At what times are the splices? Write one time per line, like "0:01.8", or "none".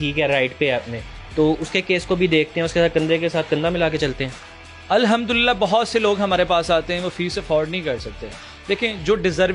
none